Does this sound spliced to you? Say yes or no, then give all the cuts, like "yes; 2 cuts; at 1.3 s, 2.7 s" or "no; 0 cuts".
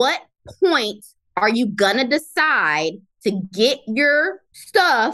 no; 0 cuts